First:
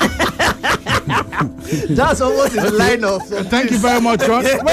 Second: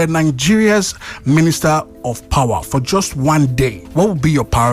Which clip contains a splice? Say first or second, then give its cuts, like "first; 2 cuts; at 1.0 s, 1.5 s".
second; 1 cut; at 3.8 s